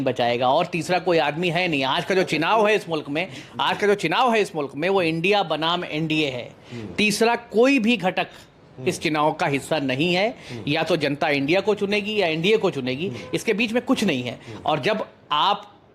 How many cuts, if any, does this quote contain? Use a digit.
0